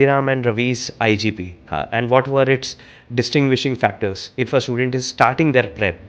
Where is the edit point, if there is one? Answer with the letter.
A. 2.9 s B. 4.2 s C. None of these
B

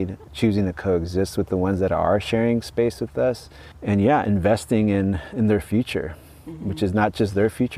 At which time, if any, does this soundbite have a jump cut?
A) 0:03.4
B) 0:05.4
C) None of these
C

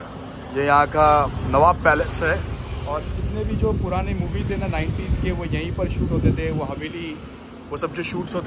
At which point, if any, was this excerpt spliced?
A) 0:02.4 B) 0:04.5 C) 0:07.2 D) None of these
D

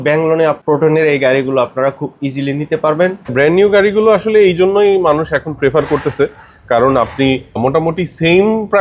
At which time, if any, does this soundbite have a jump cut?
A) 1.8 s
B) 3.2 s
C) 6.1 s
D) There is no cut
B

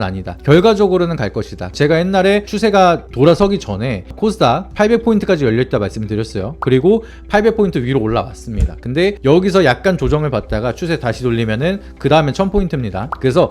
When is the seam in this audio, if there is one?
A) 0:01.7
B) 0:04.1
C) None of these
A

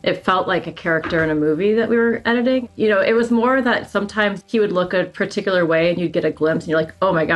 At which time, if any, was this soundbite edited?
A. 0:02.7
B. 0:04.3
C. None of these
A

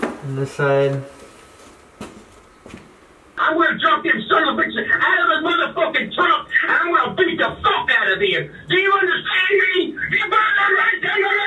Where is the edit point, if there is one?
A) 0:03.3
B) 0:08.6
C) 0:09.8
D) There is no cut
A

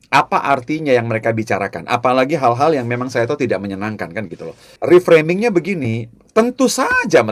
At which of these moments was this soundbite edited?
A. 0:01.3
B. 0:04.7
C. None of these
B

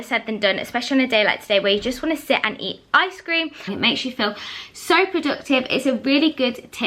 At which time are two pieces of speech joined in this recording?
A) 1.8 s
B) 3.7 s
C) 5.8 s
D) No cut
B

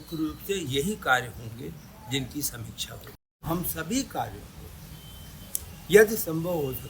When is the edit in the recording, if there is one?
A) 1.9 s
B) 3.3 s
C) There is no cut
B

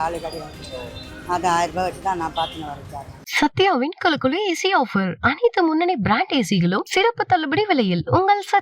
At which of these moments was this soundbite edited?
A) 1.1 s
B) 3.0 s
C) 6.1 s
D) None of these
B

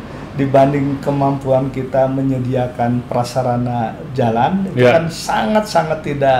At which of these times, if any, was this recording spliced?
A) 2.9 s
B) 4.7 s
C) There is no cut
C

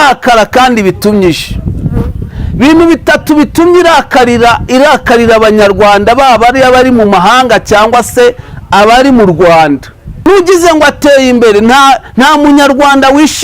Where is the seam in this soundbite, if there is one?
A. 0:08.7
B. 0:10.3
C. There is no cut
B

